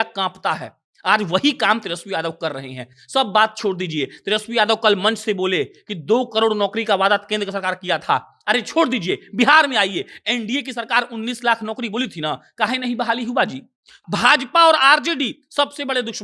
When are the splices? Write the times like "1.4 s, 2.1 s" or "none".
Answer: 14.0 s